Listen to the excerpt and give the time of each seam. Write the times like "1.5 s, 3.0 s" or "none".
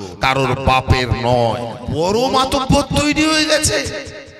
1.8 s